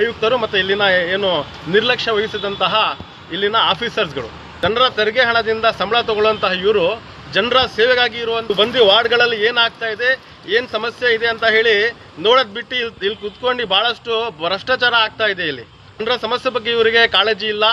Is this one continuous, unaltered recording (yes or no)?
no